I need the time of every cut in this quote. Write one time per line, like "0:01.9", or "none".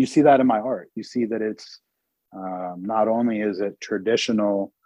none